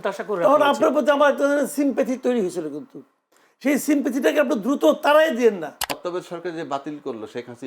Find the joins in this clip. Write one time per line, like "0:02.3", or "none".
0:05.9